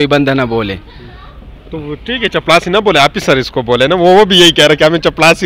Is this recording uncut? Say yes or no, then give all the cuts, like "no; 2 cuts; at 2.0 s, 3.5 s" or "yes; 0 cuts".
yes; 0 cuts